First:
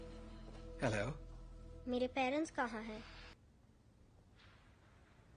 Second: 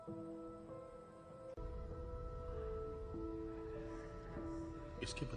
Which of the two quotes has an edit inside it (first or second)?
first